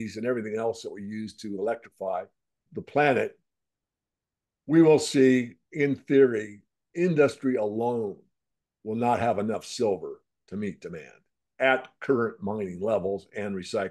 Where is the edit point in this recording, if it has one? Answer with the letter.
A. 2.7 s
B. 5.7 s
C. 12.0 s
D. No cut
A